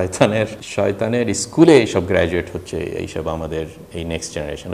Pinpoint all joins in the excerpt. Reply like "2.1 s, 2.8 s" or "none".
none